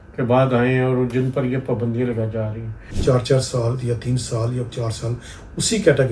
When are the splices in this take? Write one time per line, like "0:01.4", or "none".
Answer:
0:02.8

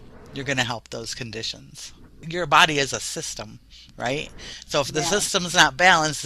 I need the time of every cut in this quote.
0:02.1

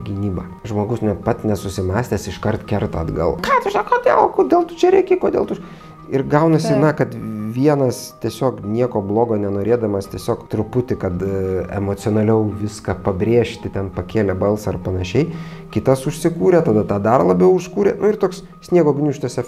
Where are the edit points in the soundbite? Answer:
0:03.4
0:10.4

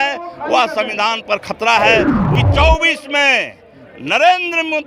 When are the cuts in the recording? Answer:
0:02.3

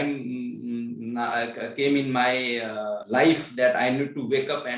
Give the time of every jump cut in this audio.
0:03.0

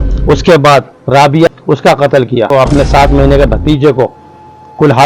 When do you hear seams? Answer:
0:01.5
0:02.5

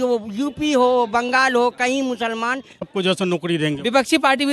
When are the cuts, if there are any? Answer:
0:02.9

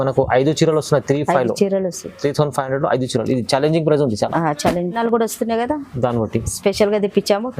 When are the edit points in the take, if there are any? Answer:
0:05.0

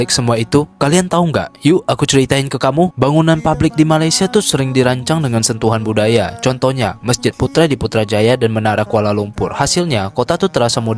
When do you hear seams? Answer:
none

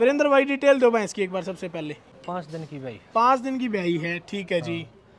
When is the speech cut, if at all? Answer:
0:02.2

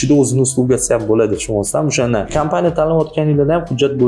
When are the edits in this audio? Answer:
0:02.3

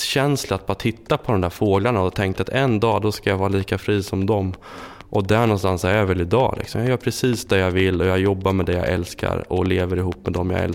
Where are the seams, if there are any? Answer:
none

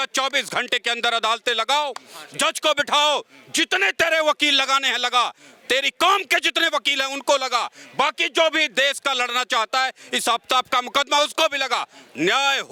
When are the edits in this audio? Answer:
none

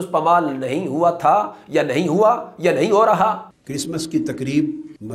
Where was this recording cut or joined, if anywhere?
0:03.5

